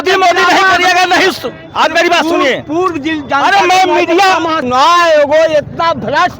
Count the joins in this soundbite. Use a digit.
1